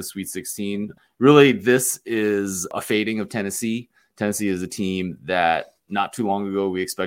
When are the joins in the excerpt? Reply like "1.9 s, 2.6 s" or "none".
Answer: 0.9 s, 2.7 s